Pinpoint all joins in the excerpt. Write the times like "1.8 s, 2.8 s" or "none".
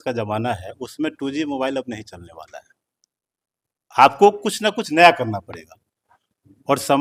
none